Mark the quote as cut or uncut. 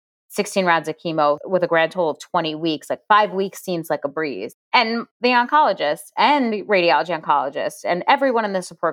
uncut